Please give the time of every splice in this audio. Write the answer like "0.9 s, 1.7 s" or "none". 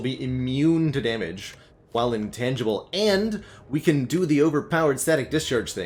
none